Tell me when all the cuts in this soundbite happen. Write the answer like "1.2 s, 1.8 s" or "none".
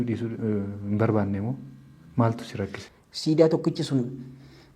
2.8 s